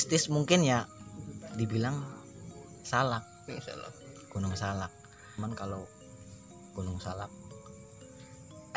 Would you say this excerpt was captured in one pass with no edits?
no; 1 cut; at 5.4 s

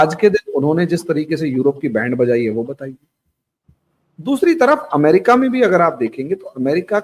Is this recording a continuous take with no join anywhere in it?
yes; 0 cuts

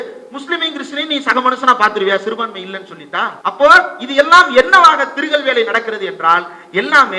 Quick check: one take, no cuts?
no; 1 cut; at 3.4 s

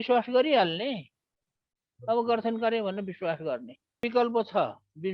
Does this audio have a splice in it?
yes; 1 cut; at 4.0 s

